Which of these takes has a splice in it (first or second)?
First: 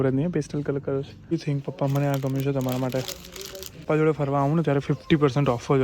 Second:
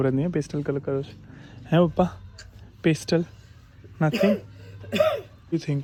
first